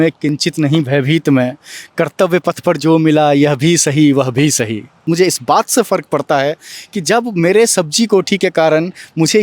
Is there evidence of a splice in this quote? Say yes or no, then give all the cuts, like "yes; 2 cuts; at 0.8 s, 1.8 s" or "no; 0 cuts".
yes; 1 cut; at 5.0 s